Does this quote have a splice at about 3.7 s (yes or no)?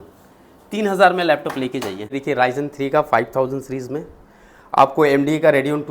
no